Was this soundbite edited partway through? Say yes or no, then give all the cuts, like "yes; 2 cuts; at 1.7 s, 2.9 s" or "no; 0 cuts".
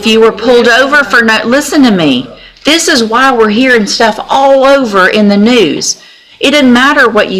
no; 0 cuts